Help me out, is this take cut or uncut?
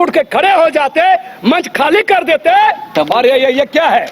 cut